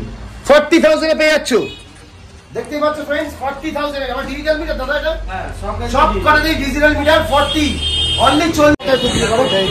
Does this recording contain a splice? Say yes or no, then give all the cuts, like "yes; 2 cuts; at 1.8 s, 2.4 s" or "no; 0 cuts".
yes; 1 cut; at 8.8 s